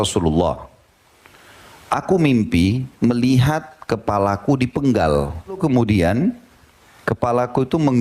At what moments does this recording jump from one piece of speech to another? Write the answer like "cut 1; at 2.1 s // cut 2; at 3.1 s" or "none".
cut 1; at 5.6 s